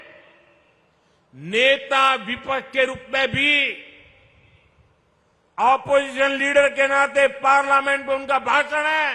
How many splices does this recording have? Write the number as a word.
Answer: zero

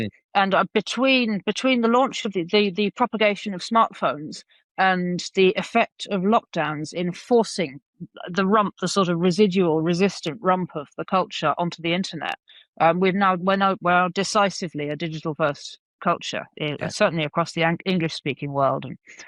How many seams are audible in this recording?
zero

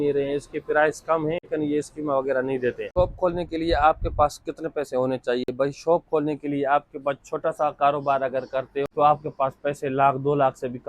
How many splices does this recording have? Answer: three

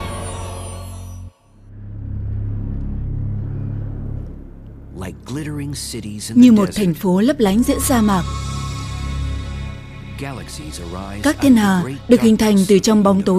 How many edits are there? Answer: one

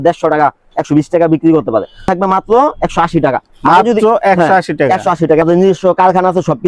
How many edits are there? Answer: two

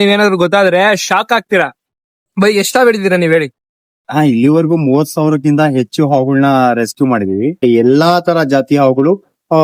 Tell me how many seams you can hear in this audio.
one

